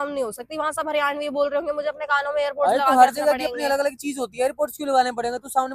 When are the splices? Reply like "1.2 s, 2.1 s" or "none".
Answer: none